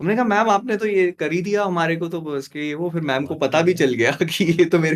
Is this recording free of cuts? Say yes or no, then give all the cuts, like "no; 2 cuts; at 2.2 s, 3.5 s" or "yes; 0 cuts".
yes; 0 cuts